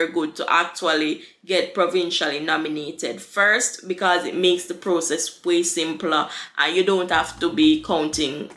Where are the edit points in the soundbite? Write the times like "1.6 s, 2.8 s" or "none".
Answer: none